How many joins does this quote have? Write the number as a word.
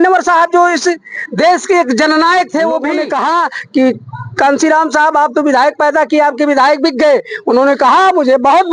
one